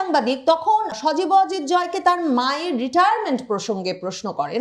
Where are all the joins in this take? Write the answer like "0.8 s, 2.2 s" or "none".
0.9 s